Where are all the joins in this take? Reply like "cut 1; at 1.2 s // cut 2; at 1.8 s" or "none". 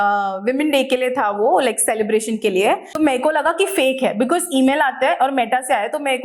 cut 1; at 2.9 s